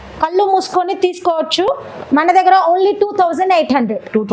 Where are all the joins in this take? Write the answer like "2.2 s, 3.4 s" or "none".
none